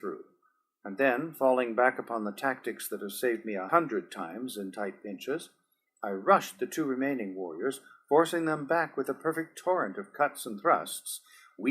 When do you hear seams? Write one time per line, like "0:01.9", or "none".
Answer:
0:04.5

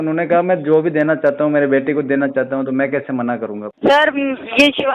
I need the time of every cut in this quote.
0:03.7

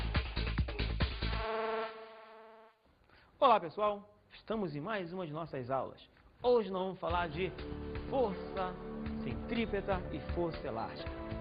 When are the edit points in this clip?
none

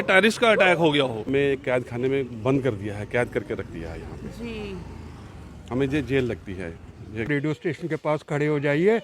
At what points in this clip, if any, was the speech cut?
0:01.3
0:07.3

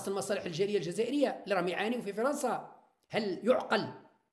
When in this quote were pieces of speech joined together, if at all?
none

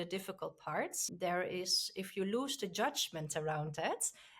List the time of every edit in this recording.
0:01.1

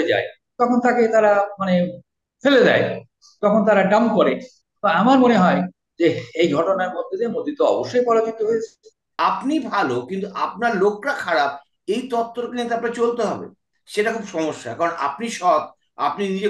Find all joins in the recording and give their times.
0:09.0

